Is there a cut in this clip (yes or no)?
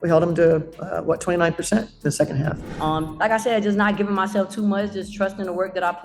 yes